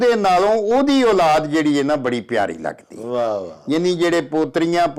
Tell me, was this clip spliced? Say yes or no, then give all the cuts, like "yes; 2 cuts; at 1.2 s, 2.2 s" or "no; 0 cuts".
no; 0 cuts